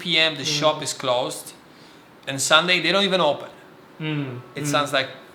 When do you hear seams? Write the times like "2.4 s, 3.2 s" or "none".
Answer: none